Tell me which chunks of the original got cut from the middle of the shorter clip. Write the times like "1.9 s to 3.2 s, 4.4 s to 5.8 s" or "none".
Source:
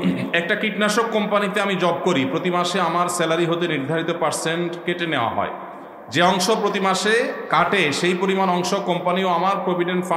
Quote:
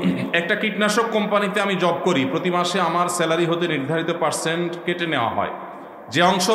none